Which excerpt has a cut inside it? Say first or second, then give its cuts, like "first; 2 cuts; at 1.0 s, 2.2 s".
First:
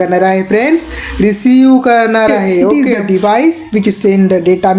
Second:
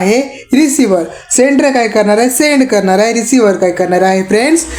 first; 1 cut; at 2.7 s